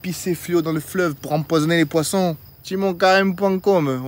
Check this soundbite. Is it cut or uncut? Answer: cut